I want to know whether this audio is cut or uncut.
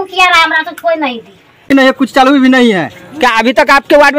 cut